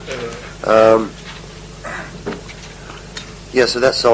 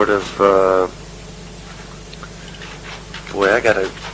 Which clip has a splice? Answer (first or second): second